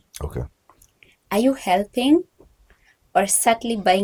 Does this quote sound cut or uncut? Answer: uncut